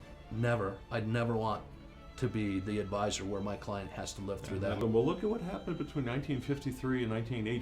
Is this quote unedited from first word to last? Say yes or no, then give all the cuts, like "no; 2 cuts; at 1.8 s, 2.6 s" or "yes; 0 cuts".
no; 1 cut; at 4.8 s